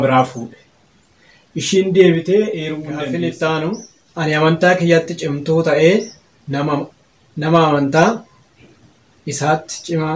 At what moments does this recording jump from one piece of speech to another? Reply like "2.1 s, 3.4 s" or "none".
2.9 s